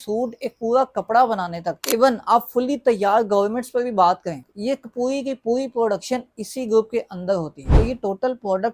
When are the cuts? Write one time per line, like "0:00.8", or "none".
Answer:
0:04.5
0:07.6